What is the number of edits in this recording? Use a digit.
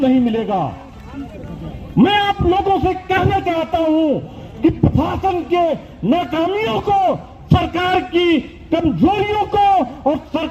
0